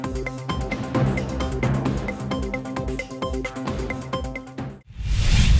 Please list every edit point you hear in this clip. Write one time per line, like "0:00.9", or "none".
0:04.7